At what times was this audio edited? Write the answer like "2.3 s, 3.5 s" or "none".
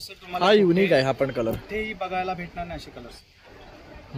none